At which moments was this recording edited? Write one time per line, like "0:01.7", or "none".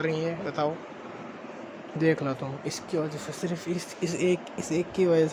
none